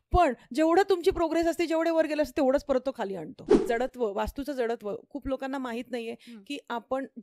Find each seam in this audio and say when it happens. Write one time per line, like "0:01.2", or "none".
0:03.6